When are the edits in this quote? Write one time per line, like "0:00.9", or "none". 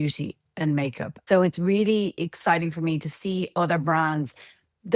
0:01.1